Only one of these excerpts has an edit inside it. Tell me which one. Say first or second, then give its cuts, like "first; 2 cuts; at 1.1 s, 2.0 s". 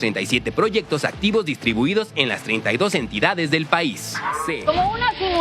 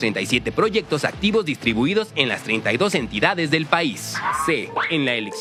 first; 1 cut; at 4.5 s